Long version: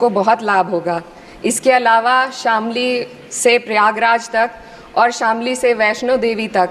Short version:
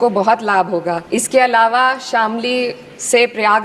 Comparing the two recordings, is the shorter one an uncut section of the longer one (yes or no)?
no